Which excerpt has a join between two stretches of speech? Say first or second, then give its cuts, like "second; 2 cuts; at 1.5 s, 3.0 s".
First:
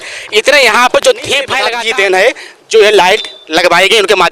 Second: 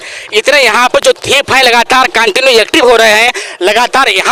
first; 1 cut; at 1.6 s